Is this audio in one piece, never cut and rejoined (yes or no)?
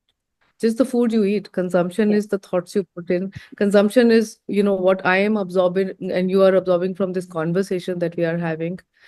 yes